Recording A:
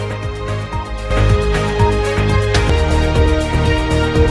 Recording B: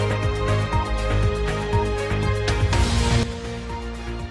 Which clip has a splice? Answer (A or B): A